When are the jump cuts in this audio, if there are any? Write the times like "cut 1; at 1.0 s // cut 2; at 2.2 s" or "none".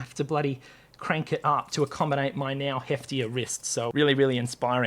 cut 1; at 3.9 s